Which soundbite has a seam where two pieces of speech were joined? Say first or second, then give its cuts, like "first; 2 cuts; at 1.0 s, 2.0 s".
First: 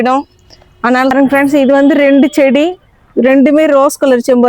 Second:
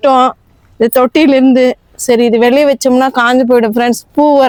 first; 1 cut; at 1.1 s